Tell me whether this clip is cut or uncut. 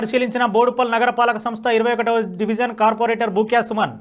uncut